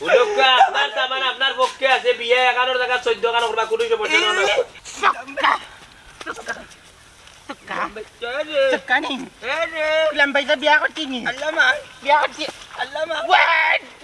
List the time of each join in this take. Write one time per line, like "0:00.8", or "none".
0:04.8